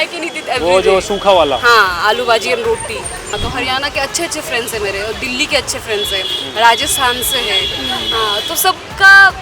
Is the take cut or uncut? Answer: cut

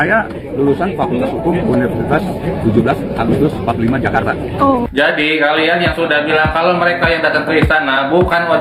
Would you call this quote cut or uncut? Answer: uncut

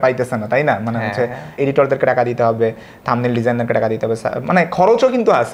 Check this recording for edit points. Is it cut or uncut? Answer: cut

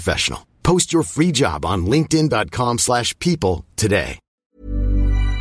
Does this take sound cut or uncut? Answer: cut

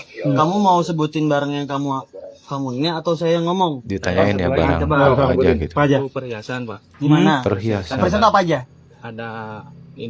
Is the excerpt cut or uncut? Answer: uncut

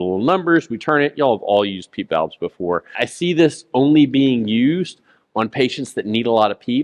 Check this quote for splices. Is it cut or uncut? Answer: cut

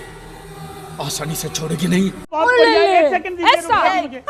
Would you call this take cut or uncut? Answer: cut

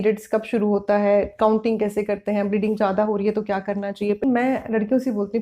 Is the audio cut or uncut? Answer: cut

